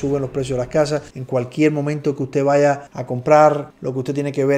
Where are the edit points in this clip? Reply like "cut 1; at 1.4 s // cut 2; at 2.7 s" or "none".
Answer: cut 1; at 1.1 s